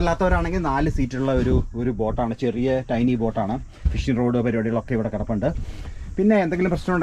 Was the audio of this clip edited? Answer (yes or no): no